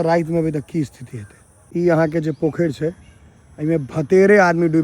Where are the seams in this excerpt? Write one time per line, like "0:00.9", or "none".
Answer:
0:01.7